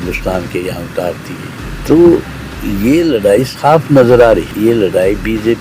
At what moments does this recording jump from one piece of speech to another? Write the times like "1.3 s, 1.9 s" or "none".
1.6 s, 4.5 s